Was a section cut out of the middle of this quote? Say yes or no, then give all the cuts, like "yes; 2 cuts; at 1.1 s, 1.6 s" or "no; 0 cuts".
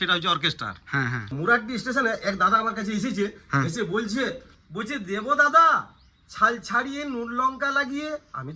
yes; 2 cuts; at 1.2 s, 4.6 s